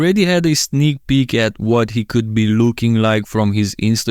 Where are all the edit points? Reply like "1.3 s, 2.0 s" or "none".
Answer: none